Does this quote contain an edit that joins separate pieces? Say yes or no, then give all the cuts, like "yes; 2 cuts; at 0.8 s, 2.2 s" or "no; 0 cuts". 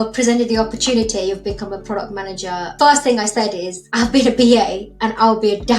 yes; 2 cuts; at 2.8 s, 3.9 s